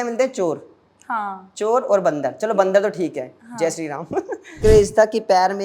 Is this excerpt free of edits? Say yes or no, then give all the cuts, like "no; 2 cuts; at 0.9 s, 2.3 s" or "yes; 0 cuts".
no; 1 cut; at 4.6 s